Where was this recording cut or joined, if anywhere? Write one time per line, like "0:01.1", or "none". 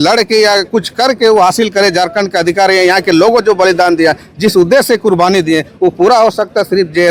none